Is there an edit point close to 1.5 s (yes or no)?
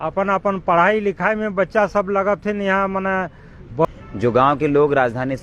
no